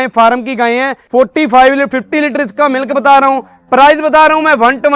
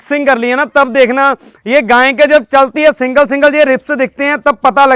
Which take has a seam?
first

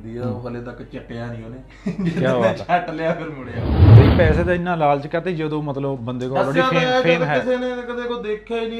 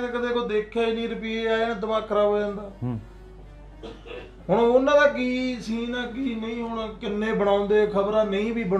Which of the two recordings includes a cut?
first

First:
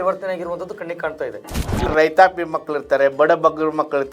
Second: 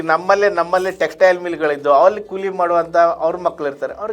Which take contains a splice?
first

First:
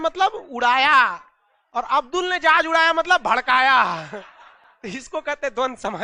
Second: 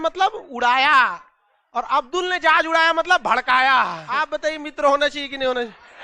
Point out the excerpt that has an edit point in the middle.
second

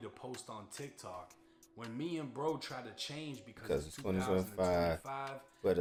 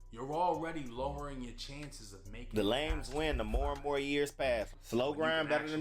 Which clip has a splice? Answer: second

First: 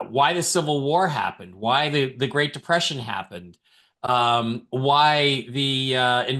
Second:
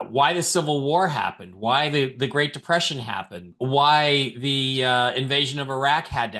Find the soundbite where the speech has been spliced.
second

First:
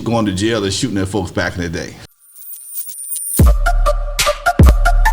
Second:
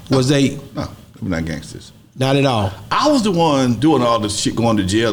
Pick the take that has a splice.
first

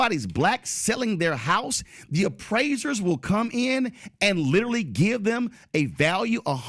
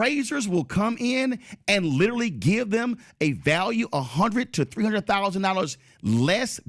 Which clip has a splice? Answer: first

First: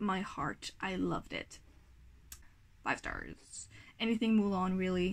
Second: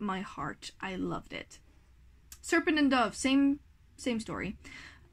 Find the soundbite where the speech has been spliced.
first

